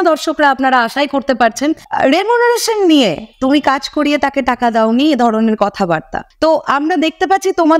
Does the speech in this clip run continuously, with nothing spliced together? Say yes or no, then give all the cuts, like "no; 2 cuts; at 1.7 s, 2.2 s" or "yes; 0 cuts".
no; 2 cuts; at 1.8 s, 6.2 s